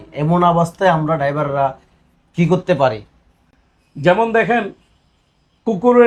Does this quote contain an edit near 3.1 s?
no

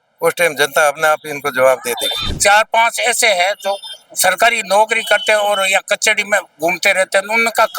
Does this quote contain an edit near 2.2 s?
yes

